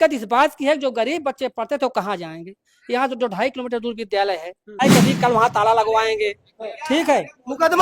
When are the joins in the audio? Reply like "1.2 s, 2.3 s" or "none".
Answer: 4.8 s

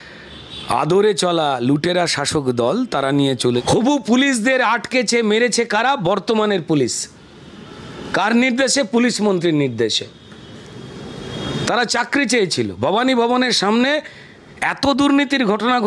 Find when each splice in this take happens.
3.6 s

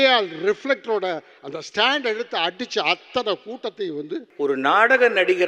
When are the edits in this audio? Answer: 4.2 s

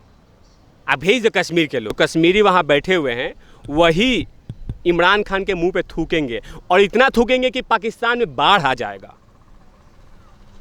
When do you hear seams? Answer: 1.9 s

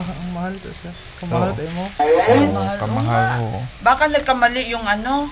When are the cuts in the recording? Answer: none

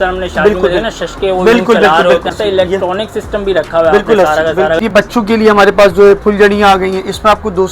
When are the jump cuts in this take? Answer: 2.3 s, 4.8 s

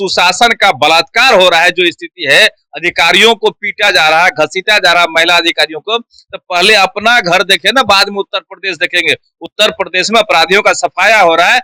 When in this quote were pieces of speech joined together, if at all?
none

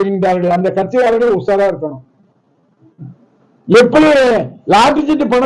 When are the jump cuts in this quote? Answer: none

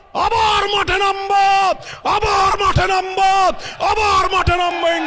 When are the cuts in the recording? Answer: none

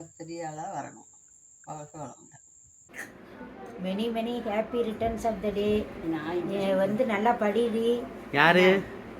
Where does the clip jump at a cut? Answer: 2.9 s

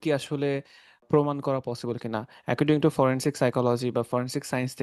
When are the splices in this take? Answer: 1.0 s

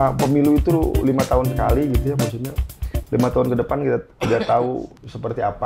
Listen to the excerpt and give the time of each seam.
none

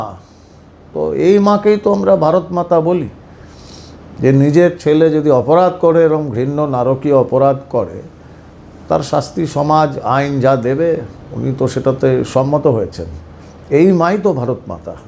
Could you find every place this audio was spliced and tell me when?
none

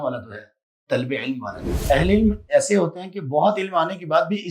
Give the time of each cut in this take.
1.8 s

